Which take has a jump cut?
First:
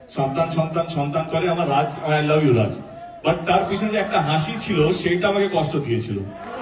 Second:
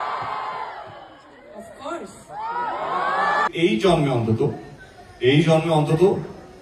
second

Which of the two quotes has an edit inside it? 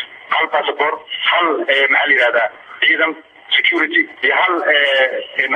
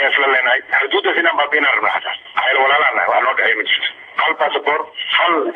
first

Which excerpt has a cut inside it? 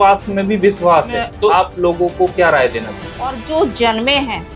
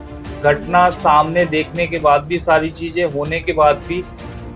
first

